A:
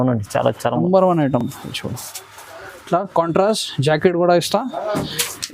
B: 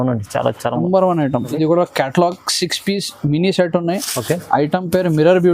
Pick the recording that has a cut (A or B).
B